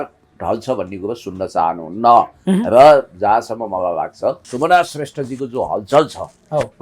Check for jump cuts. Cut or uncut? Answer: cut